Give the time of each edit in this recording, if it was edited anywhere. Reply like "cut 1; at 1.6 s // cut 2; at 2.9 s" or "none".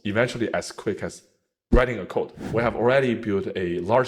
cut 1; at 2.4 s